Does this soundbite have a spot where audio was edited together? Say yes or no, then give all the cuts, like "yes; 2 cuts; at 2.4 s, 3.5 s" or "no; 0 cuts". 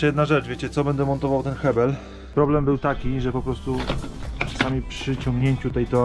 yes; 1 cut; at 2.1 s